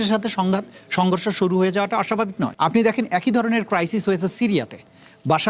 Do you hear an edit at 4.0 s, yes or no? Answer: no